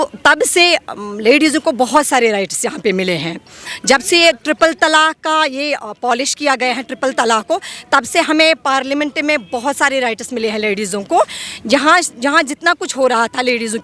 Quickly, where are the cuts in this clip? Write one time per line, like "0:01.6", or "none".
none